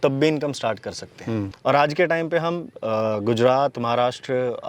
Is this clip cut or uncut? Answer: cut